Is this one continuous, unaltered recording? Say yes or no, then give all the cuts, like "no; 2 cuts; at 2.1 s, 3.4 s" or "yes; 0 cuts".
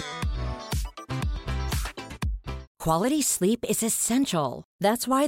no; 1 cut; at 2.7 s